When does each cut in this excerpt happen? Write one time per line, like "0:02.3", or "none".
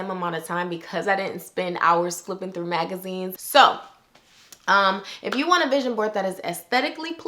0:03.3